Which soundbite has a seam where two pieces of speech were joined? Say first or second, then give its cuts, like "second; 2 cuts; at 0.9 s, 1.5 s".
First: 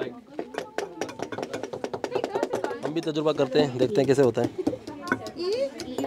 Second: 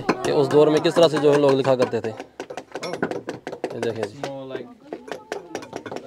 first; 1 cut; at 2.9 s